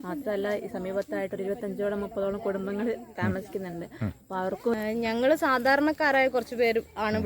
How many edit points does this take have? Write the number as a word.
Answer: one